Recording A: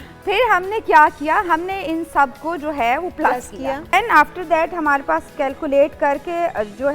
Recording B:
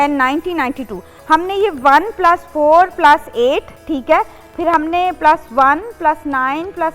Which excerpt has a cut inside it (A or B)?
A